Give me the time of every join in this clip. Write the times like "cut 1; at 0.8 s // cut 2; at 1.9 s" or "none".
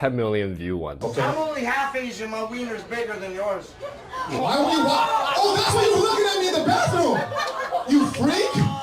cut 1; at 1.0 s